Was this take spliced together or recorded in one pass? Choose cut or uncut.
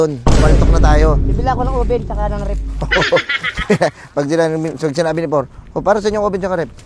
uncut